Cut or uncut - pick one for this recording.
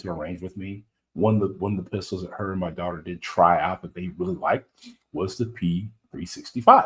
uncut